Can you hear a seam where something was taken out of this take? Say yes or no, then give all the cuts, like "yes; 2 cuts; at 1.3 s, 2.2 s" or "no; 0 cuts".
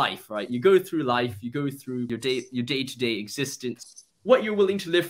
yes; 2 cuts; at 2.1 s, 3.8 s